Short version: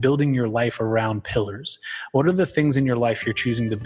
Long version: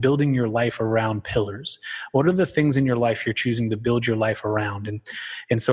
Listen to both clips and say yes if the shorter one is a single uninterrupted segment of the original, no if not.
yes